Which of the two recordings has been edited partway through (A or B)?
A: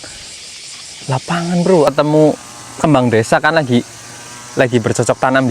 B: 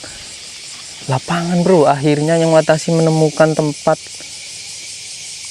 A